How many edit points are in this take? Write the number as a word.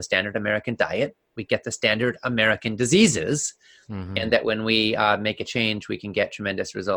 zero